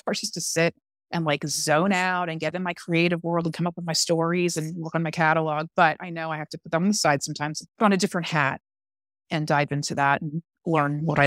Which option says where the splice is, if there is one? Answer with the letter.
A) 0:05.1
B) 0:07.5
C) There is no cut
B